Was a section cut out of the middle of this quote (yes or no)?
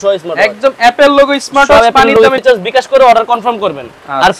yes